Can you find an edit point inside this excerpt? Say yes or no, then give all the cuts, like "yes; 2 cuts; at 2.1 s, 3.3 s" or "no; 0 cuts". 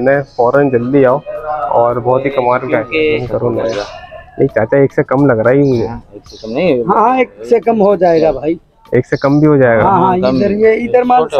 yes; 1 cut; at 3.3 s